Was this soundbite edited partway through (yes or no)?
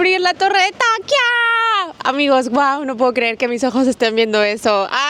no